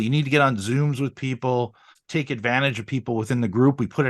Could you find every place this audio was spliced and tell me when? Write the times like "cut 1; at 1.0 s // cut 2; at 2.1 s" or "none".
cut 1; at 2.0 s